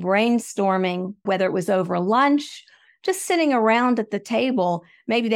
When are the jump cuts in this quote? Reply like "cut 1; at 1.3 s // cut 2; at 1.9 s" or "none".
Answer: cut 1; at 1.2 s